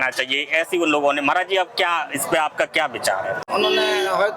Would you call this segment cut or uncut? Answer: cut